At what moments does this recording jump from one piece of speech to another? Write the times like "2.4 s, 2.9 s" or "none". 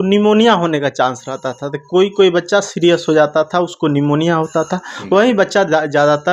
none